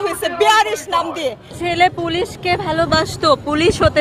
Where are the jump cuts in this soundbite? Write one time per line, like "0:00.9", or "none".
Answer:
0:01.5